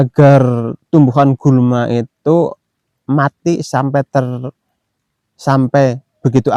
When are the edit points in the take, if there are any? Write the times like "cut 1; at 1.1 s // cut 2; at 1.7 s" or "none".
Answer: none

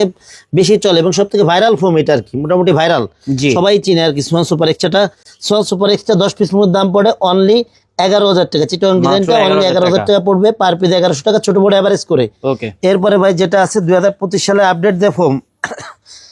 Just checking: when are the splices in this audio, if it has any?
none

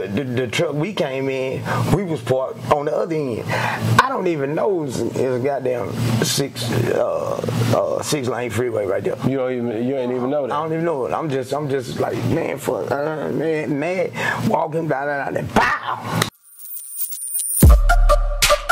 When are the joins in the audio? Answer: cut 1; at 16.3 s

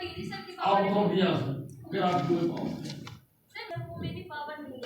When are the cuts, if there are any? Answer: cut 1; at 3.6 s

